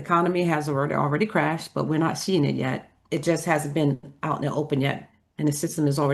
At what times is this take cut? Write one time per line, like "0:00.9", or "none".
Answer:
none